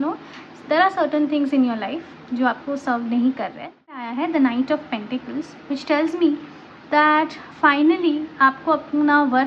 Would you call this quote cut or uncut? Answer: cut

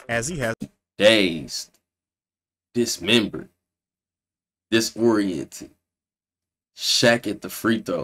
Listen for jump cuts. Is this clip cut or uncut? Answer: uncut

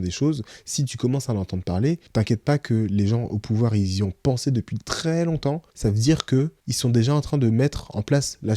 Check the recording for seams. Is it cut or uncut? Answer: cut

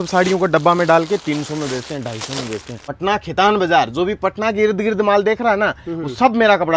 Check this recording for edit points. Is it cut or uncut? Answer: cut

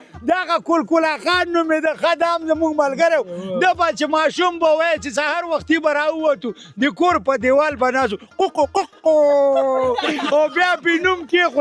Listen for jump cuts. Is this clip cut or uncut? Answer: uncut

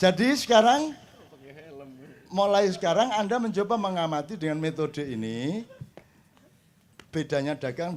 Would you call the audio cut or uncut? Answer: uncut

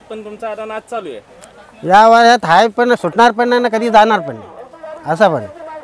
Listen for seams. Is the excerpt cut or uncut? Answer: uncut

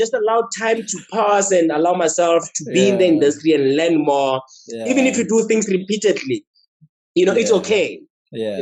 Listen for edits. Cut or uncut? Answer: uncut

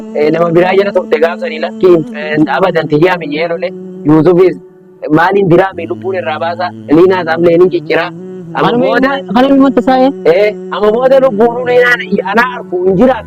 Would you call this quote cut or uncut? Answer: uncut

